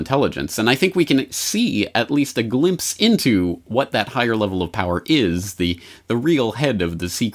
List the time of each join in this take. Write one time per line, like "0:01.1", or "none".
none